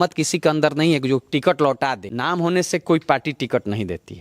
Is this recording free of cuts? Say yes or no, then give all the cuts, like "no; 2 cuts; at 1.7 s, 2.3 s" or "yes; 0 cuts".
no; 1 cut; at 2.1 s